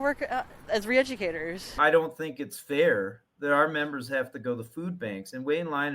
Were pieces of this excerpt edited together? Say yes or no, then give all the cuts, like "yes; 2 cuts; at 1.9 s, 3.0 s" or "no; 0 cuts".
yes; 1 cut; at 1.8 s